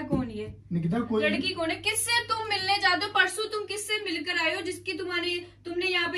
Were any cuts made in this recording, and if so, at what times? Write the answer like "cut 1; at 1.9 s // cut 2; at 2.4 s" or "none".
none